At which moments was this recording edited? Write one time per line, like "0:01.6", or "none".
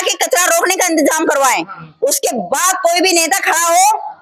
none